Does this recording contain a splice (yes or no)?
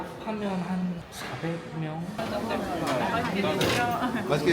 yes